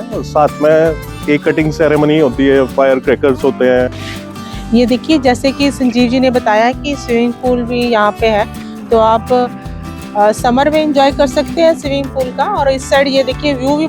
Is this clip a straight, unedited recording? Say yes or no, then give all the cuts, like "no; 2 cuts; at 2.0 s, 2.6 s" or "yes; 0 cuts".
no; 1 cut; at 4.0 s